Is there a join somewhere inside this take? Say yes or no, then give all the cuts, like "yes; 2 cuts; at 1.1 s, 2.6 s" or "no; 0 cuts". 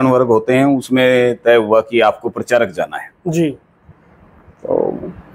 no; 0 cuts